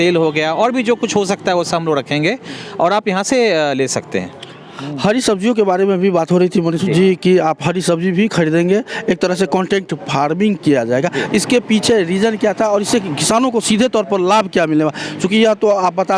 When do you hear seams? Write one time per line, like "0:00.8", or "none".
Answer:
none